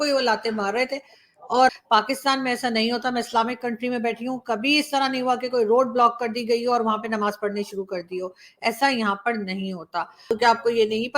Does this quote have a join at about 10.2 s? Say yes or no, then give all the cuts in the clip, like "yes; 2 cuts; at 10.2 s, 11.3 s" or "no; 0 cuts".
yes; 2 cuts; at 1.7 s, 10.2 s